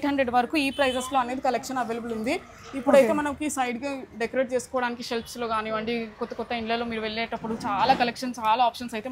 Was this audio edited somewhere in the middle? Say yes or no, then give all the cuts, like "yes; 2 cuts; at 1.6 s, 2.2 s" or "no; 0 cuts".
no; 0 cuts